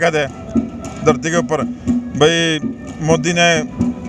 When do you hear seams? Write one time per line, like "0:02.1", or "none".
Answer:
none